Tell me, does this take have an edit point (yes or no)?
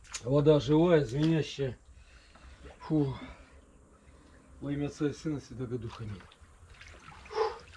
no